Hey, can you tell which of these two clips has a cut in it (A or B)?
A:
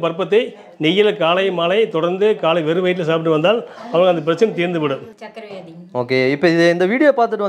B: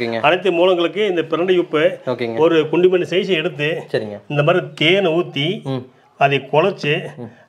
A